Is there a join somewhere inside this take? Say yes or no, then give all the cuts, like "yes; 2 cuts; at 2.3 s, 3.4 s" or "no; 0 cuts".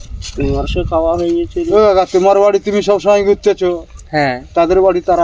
no; 0 cuts